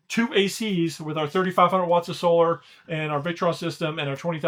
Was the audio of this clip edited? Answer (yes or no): no